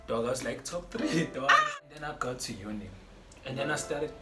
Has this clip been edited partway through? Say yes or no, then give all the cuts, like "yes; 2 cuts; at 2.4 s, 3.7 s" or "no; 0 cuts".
yes; 1 cut; at 1.7 s